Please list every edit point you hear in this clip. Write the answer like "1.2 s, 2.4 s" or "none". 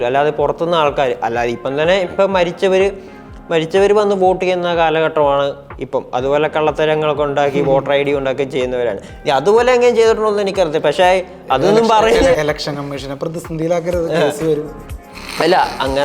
12.4 s